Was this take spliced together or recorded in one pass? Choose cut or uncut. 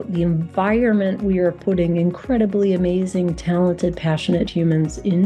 uncut